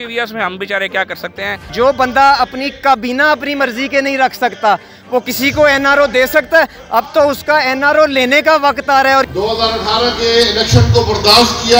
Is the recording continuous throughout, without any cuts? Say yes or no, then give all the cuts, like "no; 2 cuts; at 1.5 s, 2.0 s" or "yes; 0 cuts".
no; 2 cuts; at 1.7 s, 9.3 s